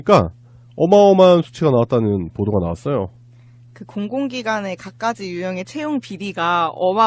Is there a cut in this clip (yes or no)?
no